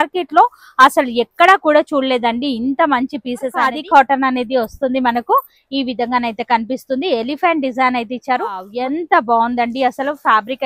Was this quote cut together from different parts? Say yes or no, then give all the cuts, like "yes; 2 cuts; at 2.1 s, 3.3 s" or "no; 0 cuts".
yes; 2 cuts; at 3.8 s, 8.7 s